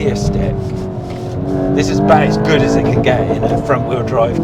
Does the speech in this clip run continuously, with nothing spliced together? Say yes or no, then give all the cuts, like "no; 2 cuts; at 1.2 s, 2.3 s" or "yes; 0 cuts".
yes; 0 cuts